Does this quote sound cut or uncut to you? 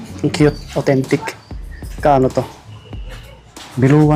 uncut